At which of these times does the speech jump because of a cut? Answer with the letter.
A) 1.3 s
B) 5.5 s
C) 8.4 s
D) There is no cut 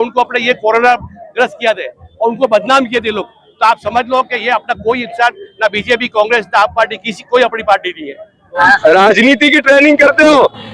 C